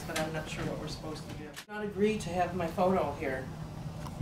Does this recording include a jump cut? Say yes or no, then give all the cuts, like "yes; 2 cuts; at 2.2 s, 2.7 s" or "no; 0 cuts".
yes; 1 cut; at 1.8 s